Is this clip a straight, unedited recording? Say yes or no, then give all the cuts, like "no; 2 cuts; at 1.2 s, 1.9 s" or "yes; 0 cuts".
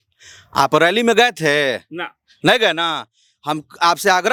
yes; 0 cuts